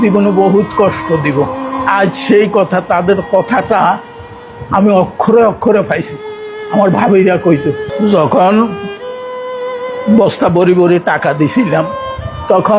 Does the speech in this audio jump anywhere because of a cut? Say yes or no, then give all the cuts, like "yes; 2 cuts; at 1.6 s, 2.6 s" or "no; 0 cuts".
yes; 1 cut; at 7.8 s